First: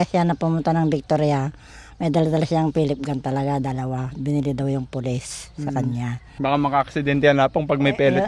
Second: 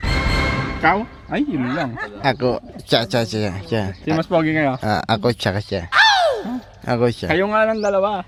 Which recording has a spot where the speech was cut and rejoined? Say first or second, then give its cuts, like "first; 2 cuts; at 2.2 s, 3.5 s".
first; 1 cut; at 6.3 s